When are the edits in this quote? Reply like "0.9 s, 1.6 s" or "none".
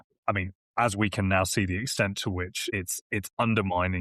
2.7 s